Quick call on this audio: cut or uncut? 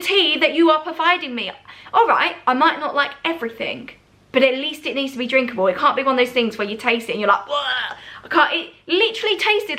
uncut